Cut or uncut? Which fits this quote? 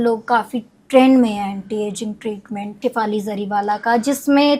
cut